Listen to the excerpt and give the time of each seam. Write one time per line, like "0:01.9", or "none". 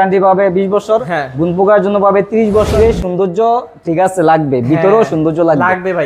0:02.8